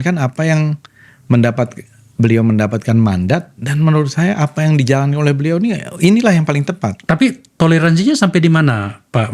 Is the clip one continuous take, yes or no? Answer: yes